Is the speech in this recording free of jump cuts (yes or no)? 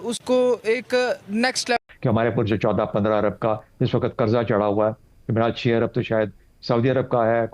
no